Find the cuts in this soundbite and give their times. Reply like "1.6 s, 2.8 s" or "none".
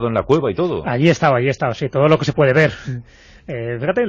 1.4 s